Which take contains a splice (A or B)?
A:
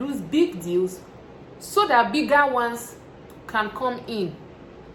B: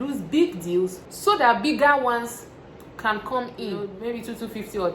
B